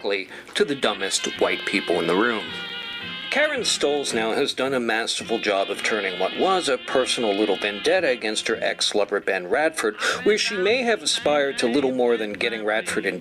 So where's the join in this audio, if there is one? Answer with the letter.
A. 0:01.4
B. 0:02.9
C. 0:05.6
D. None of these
C